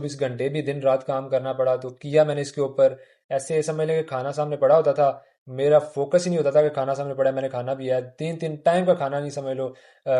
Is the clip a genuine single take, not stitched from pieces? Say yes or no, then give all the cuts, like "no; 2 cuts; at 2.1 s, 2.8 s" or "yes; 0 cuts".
yes; 0 cuts